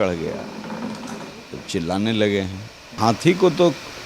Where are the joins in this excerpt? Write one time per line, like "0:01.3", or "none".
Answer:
0:03.0